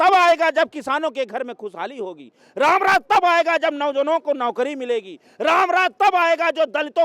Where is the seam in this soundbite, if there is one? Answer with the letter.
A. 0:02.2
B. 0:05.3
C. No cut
C